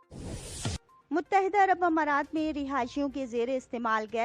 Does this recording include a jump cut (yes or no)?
yes